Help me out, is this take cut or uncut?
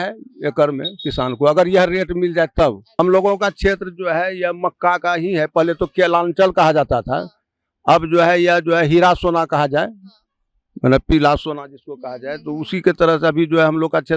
cut